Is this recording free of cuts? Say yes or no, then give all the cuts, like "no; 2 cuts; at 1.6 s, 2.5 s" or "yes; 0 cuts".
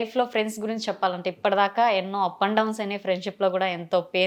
yes; 0 cuts